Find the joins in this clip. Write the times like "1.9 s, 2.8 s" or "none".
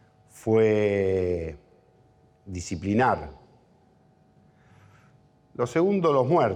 4.7 s